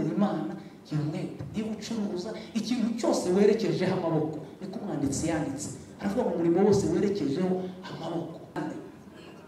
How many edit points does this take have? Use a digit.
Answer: 1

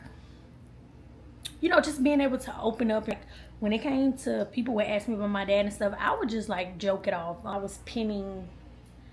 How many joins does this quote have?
2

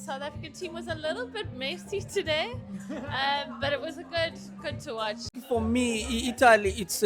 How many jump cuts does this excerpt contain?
1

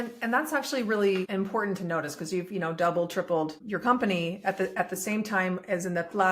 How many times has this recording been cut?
2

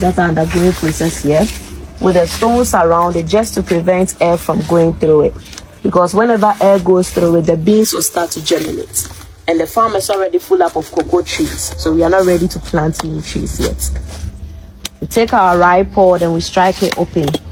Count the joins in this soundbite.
0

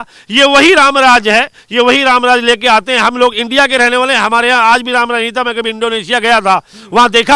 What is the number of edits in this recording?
0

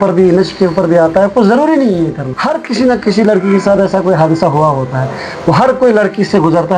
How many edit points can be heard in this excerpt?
1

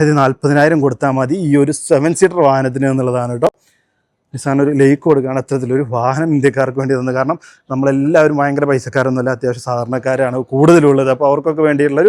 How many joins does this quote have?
0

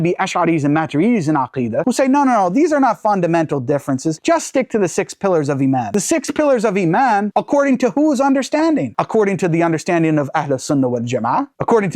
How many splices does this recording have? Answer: 3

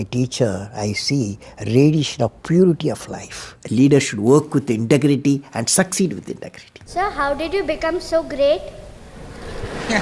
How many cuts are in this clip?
2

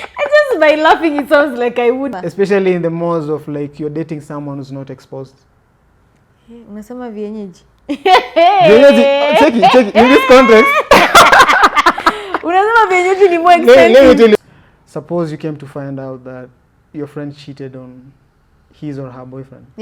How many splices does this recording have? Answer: 2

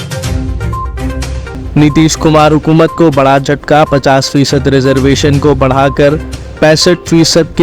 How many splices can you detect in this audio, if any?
1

